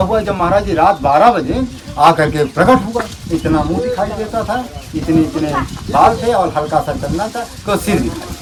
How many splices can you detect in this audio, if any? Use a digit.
0